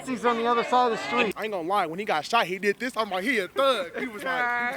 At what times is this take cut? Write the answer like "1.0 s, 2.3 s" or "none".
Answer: 1.3 s